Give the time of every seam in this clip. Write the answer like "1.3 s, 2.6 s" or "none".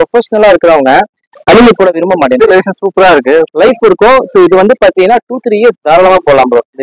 none